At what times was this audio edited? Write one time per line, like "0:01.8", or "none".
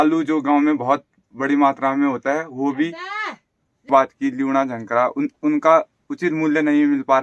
none